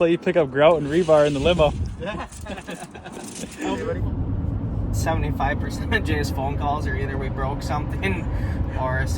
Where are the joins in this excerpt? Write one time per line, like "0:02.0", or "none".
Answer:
0:03.9